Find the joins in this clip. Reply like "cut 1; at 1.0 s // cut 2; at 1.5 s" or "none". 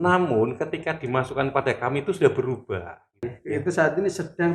cut 1; at 3.3 s